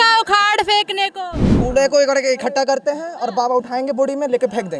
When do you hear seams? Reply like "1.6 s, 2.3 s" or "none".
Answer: none